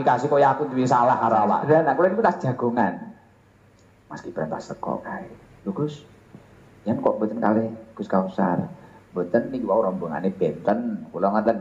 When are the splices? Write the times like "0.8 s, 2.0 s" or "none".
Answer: 1.6 s